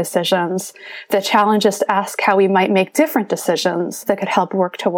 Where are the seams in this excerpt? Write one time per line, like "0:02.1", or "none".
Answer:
0:04.0